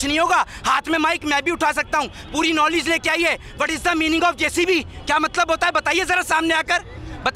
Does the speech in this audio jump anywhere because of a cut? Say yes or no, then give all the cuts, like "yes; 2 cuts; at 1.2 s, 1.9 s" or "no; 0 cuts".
no; 0 cuts